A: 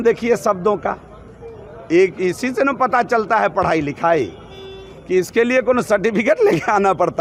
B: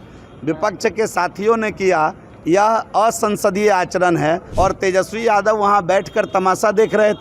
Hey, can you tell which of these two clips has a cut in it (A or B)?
B